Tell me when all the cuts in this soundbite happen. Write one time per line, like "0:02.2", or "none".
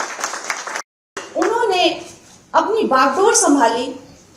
0:01.2